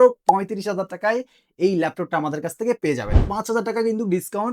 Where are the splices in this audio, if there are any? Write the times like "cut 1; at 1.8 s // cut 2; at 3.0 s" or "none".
cut 1; at 3.2 s